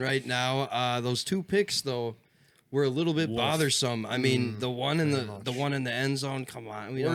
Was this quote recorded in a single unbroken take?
yes; 0 cuts

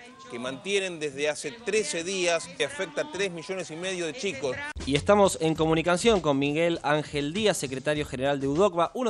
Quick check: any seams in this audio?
yes; 2 cuts; at 2.6 s, 4.8 s

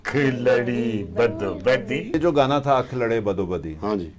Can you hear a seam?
yes; 1 cut; at 2.1 s

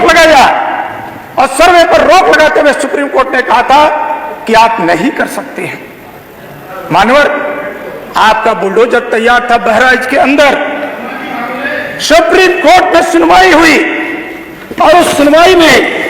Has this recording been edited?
no; 0 cuts

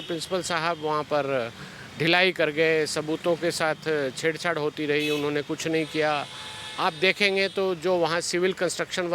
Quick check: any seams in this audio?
no; 0 cuts

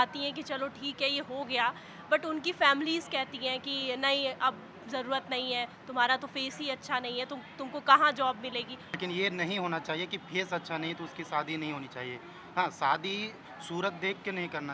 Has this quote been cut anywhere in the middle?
yes; 1 cut; at 8.8 s

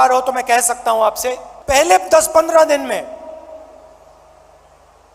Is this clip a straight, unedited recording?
no; 1 cut; at 1.5 s

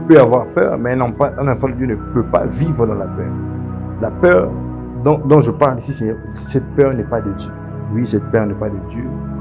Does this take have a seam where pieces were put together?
no; 0 cuts

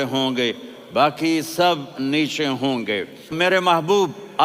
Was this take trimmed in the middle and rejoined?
yes; 1 cut; at 3.3 s

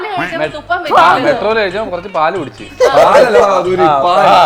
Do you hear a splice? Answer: no; 0 cuts

